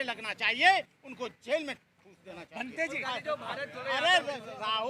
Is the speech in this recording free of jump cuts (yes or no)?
no